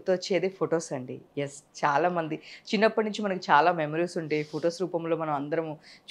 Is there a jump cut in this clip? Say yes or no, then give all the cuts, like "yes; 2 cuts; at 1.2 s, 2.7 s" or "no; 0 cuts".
no; 0 cuts